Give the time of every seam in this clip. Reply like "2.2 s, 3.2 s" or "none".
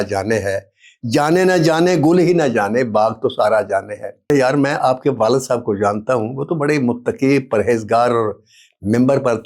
4.3 s